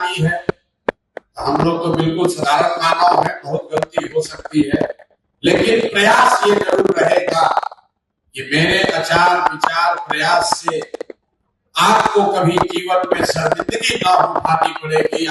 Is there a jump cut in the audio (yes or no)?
no